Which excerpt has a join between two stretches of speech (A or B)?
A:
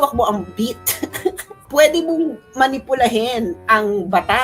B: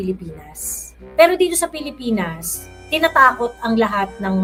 A